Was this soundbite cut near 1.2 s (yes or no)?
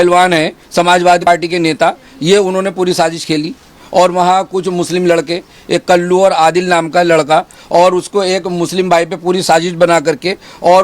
yes